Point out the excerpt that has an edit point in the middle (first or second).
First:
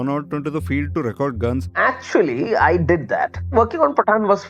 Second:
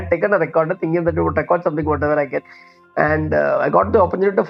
first